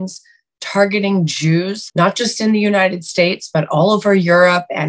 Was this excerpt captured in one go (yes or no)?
yes